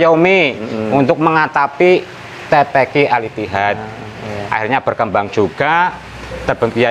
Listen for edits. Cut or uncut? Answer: uncut